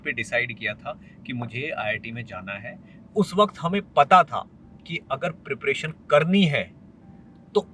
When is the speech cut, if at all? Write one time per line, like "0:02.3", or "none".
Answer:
0:03.1